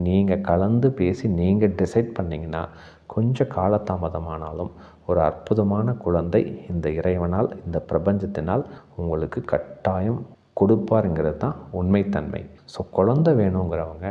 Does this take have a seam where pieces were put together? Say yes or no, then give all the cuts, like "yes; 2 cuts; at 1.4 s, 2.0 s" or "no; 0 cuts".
yes; 1 cut; at 12.6 s